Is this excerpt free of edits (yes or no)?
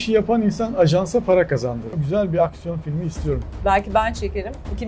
no